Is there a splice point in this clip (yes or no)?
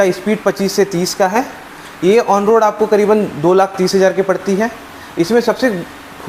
no